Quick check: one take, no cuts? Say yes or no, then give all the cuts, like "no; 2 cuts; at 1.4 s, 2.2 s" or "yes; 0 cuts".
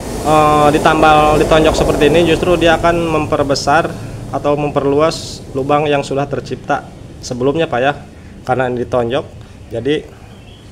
yes; 0 cuts